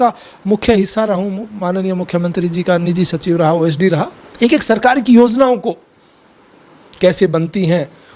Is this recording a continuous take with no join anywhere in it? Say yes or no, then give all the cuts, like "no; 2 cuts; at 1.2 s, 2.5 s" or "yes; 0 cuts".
yes; 0 cuts